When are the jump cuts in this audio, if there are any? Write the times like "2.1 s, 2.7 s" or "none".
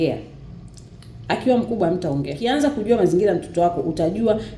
2.4 s